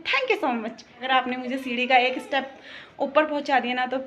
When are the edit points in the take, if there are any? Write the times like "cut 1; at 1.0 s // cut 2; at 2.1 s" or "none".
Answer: cut 1; at 1.0 s